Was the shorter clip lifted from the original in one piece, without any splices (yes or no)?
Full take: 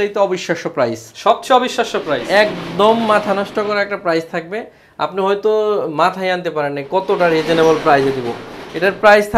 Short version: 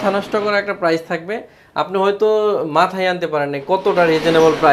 yes